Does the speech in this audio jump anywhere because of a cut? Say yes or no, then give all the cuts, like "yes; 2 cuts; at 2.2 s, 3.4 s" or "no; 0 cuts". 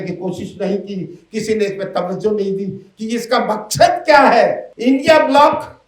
yes; 1 cut; at 4.7 s